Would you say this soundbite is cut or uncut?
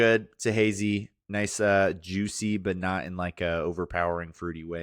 uncut